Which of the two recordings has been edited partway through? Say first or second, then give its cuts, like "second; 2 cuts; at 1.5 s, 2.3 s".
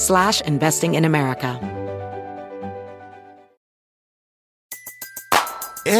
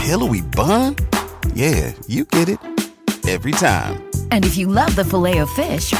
first; 1 cut; at 1.6 s